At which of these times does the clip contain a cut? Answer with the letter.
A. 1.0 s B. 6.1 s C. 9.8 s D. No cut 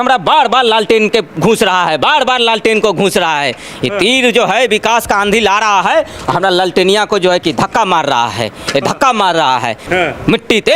C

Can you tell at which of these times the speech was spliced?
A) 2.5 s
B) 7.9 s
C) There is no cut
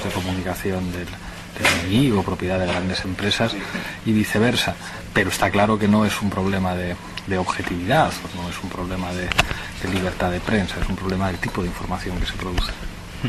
B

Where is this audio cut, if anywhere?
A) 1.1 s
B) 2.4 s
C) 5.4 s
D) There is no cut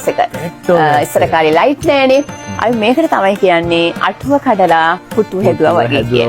B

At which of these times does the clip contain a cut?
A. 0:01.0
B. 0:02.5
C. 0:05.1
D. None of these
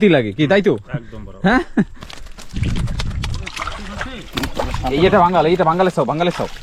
B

